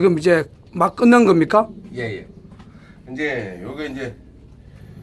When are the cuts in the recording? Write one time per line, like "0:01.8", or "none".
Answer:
none